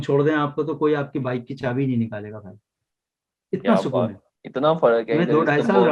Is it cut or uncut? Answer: uncut